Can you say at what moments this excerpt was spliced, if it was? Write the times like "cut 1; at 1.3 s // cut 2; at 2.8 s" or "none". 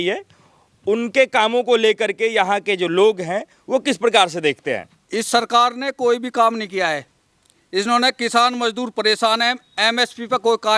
cut 1; at 4.9 s